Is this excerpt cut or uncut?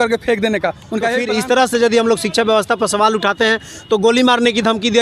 cut